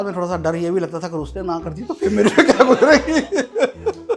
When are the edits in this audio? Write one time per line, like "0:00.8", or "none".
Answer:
none